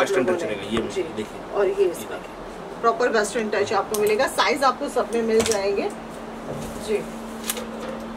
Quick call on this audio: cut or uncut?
uncut